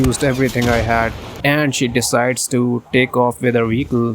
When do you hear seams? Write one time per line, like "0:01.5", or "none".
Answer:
0:01.2